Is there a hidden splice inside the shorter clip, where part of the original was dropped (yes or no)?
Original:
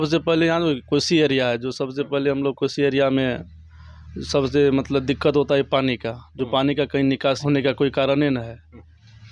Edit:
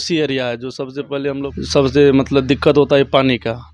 yes